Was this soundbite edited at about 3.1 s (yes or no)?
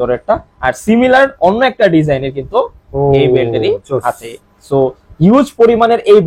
no